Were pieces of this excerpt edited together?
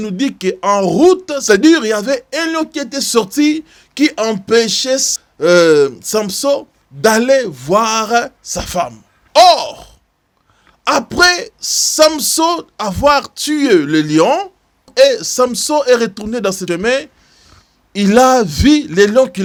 no; 0 cuts

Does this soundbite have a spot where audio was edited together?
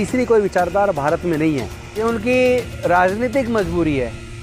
yes; 1 cut; at 2.0 s

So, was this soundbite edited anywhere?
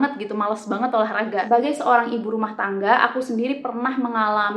yes; 1 cut; at 1.4 s

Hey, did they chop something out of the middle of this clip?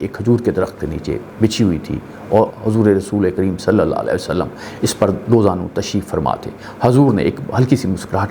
no; 0 cuts

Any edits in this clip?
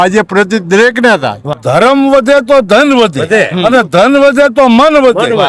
yes; 1 cut; at 1.5 s

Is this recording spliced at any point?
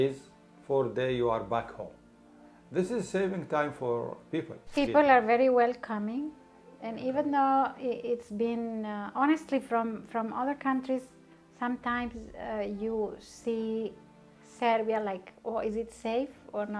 yes; 1 cut; at 4.6 s

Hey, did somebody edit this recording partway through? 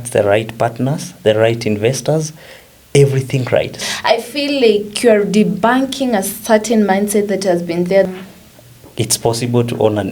yes; 2 cuts; at 3.8 s, 8.1 s

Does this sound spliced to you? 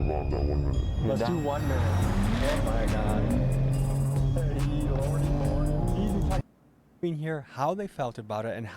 yes; 1 cut; at 6.4 s

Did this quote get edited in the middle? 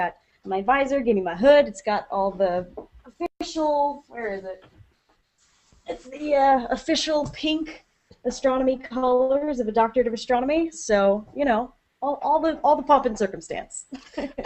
yes; 1 cut; at 5.4 s

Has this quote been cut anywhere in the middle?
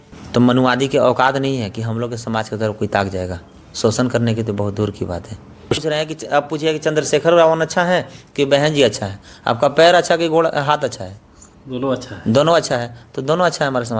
yes; 1 cut; at 5.8 s

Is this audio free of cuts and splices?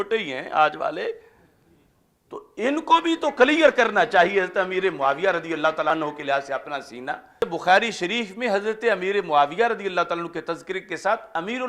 no; 2 cuts; at 5.9 s, 7.4 s

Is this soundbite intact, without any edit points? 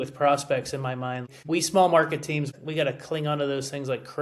no; 2 cuts; at 1.3 s, 2.5 s

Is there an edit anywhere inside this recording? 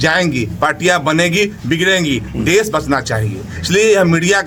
no; 0 cuts

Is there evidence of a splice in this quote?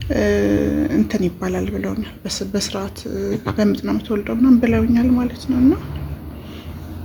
no; 0 cuts

